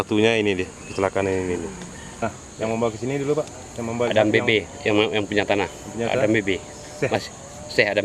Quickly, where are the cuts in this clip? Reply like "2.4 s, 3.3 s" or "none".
2.2 s